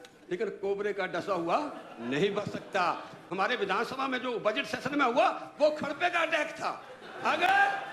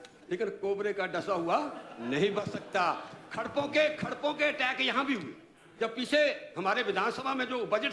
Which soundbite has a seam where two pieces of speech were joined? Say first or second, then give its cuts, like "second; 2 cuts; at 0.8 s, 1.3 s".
first; 1 cut; at 3.2 s